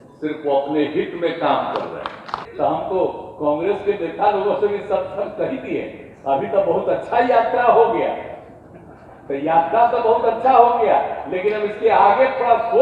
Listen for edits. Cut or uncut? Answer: cut